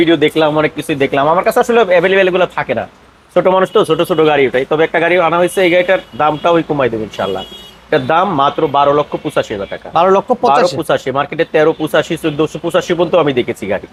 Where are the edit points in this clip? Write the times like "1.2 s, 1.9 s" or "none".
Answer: none